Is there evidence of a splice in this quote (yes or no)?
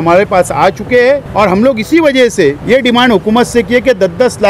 yes